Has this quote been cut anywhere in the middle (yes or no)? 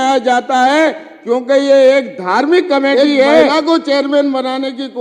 yes